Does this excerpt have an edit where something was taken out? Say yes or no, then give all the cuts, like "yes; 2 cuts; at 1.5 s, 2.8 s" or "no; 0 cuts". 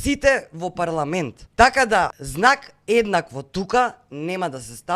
yes; 2 cuts; at 1.4 s, 2.2 s